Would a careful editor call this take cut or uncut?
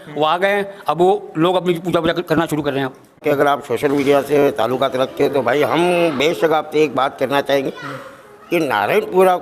uncut